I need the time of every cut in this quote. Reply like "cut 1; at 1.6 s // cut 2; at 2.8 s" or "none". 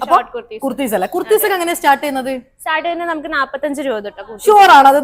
none